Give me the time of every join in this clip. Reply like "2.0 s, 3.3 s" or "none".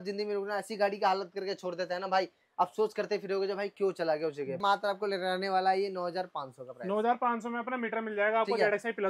4.6 s

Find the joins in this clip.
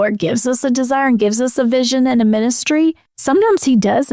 3.1 s

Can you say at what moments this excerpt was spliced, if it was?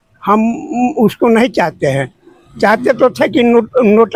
none

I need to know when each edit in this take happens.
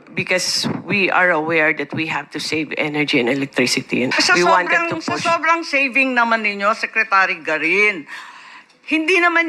4.1 s

